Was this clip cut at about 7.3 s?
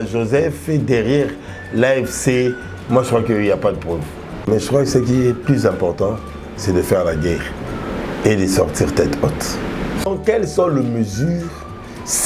no; 2 cuts; at 4.5 s, 10.0 s

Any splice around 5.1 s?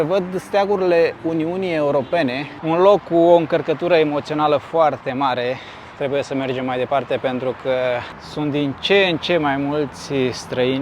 no; 2 cuts; at 2.5 s, 8.1 s

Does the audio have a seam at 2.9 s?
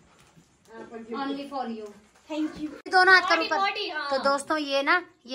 yes; 1 cut; at 2.9 s

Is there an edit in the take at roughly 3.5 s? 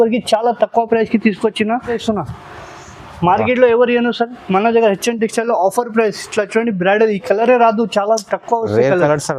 no; 1 cut; at 2.0 s

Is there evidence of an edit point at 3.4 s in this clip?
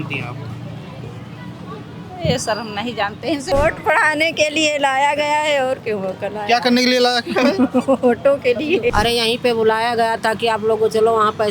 yes; 2 cuts; at 3.4 s, 8.9 s

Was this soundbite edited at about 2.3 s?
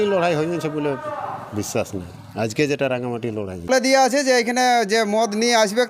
no; 1 cut; at 3.7 s

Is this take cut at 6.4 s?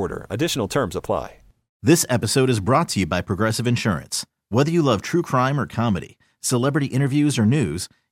no; 1 cut; at 1.7 s

